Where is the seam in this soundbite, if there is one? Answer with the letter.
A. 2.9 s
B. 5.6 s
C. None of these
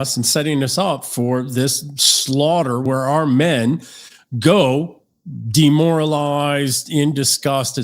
A